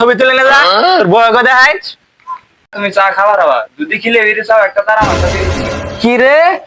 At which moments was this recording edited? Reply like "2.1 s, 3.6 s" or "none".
2.7 s